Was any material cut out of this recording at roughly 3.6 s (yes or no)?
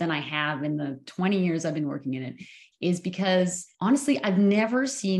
yes